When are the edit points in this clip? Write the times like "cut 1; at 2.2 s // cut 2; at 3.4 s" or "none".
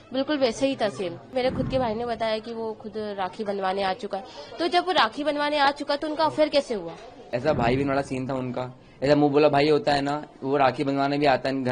cut 1; at 1.3 s // cut 2; at 7.3 s